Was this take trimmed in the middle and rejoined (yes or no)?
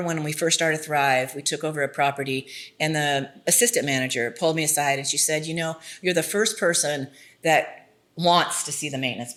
no